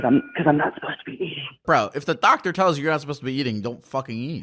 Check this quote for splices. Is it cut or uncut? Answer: cut